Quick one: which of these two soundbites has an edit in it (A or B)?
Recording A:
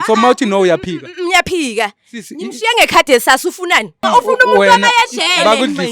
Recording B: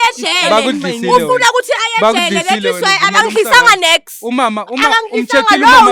A